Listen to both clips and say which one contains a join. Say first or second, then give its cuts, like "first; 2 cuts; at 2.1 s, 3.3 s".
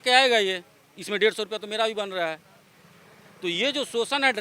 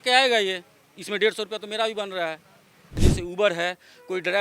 second; 1 cut; at 3.0 s